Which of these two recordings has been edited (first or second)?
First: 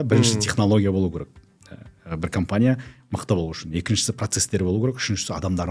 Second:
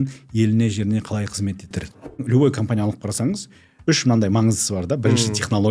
second